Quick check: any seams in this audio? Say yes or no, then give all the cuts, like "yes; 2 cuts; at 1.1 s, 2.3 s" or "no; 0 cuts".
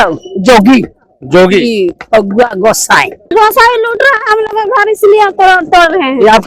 yes; 1 cut; at 3.3 s